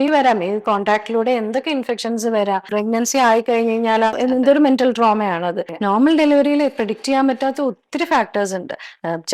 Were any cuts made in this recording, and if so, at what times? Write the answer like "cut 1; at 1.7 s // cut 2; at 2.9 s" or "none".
cut 1; at 2.7 s // cut 2; at 4.1 s // cut 3; at 5.7 s